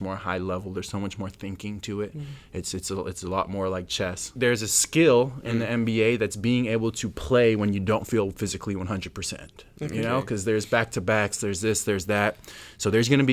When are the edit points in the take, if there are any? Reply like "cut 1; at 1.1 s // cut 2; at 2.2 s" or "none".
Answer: cut 1; at 4.3 s